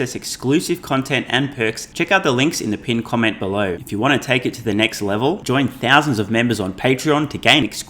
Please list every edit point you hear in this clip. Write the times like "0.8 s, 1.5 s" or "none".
1.8 s, 3.8 s